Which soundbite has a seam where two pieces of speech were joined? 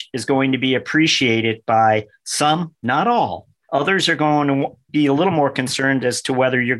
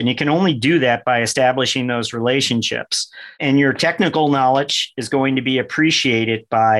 second; 1 cut; at 3.4 s

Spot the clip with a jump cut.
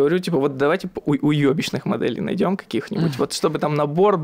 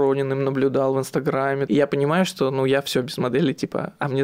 second; 1 cut; at 1.6 s

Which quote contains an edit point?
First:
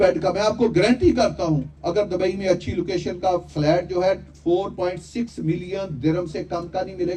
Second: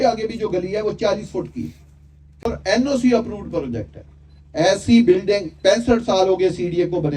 second; 1 cut; at 2.4 s

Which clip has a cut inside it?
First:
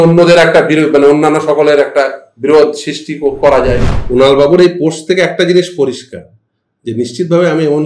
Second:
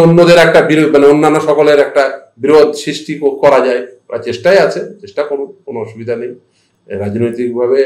first; 1 cut; at 3.9 s

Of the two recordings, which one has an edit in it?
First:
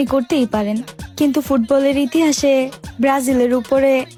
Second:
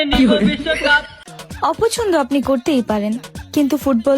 second; 1 cut; at 1.3 s

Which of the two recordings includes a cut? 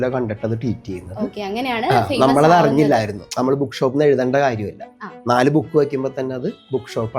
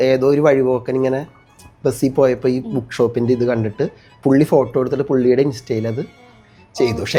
first; 1 cut; at 3.2 s

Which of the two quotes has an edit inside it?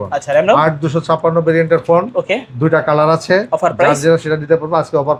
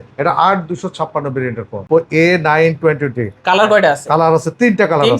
second; 1 cut; at 1.8 s

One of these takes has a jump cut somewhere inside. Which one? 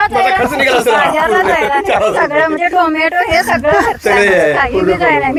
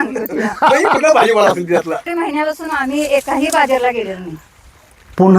second; 1 cut; at 2.1 s

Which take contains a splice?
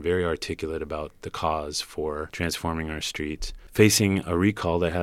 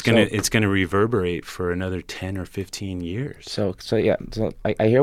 first; 2 cuts; at 2.3 s, 3.5 s

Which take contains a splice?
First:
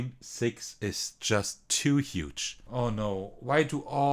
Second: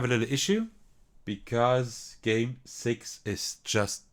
first; 1 cut; at 2.6 s

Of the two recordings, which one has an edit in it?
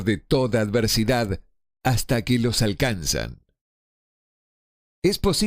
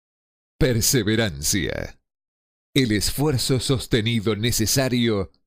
first; 1 cut; at 2.4 s

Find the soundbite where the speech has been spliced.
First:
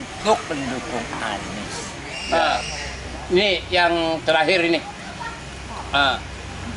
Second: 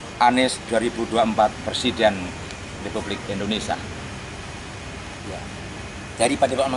first; 1 cut; at 2.2 s

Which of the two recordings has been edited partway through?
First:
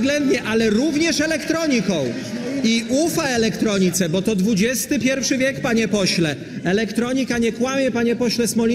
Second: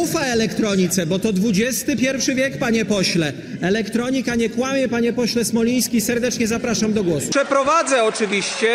second; 1 cut; at 7.3 s

